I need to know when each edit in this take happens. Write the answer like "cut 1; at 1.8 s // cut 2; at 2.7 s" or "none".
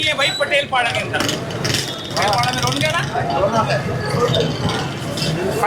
none